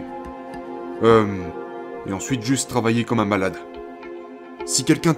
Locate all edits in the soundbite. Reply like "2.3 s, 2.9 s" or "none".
4.2 s